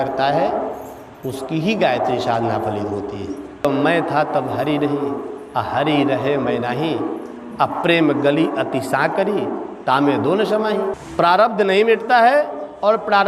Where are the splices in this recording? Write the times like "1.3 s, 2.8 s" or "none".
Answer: 3.6 s, 11.0 s